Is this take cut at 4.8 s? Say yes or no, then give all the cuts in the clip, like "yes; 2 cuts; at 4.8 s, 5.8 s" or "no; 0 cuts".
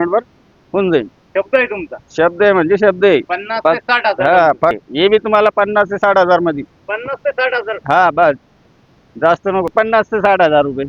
yes; 2 cuts; at 4.8 s, 9.7 s